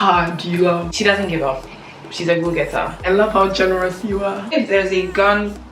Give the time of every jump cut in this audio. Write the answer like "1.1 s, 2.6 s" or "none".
0.9 s, 3.0 s, 4.4 s